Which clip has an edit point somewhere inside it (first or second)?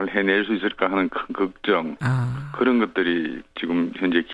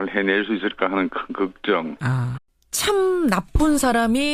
first